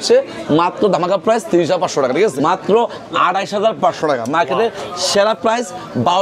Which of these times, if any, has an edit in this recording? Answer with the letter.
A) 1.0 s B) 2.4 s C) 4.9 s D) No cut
B